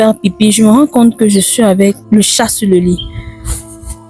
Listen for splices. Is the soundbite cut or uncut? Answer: cut